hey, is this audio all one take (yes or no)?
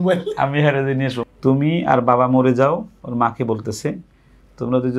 no